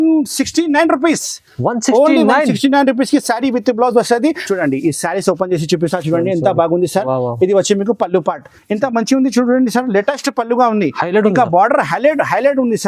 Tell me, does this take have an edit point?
yes; 1 cut; at 4.4 s

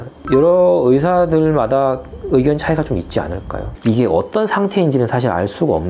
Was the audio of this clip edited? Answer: yes; 1 cut; at 3.8 s

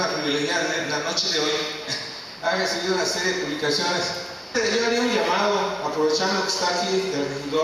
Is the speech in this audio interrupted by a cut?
no; 0 cuts

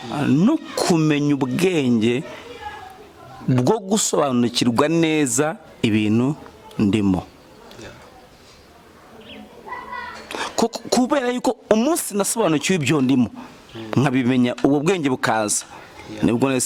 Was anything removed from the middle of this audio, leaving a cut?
no; 0 cuts

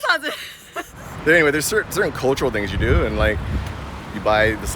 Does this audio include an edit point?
yes; 1 cut; at 1.0 s

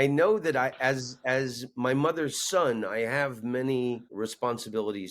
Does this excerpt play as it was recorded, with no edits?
no; 1 cut; at 4.1 s

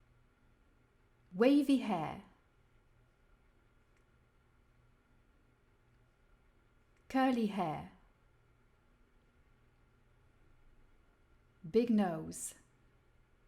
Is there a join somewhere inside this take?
no; 0 cuts

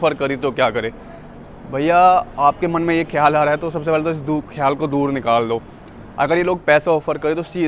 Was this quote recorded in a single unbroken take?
yes; 0 cuts

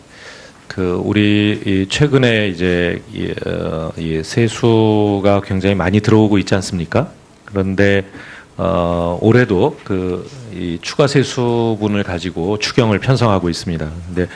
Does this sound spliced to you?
yes; 1 cut; at 4.2 s

